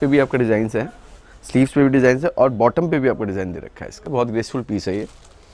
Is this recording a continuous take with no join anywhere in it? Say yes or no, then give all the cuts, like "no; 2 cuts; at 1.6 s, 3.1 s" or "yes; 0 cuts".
no; 1 cut; at 4.1 s